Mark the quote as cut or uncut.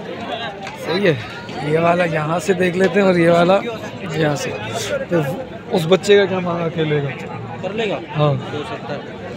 uncut